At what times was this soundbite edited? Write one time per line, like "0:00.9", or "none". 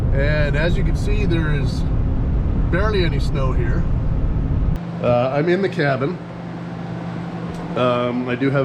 0:04.8